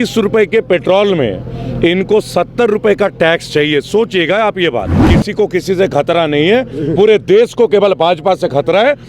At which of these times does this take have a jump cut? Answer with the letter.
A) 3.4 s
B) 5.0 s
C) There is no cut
B